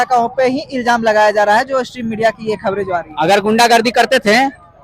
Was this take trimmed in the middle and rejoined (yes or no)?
no